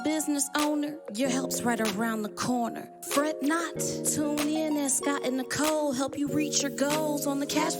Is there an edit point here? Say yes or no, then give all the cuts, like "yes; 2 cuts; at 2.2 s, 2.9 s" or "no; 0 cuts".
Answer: no; 0 cuts